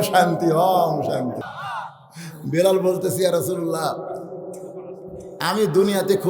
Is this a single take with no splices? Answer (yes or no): no